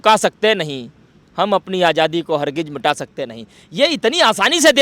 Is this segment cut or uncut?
uncut